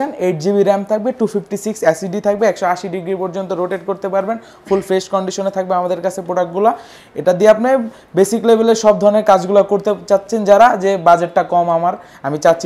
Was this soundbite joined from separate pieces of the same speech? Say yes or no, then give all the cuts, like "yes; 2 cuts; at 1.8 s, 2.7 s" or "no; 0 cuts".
no; 0 cuts